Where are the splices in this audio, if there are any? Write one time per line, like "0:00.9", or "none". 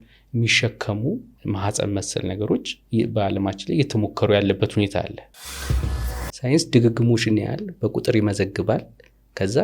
0:01.3
0:05.7